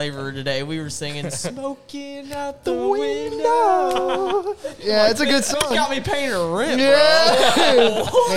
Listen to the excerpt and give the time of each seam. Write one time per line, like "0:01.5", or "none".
none